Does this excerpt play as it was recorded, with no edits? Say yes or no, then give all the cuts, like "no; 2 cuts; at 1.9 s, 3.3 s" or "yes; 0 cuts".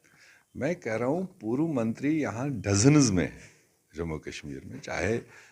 yes; 0 cuts